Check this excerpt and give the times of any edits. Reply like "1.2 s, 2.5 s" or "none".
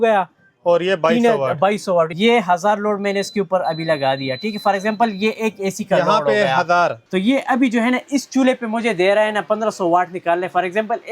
2.1 s, 7.0 s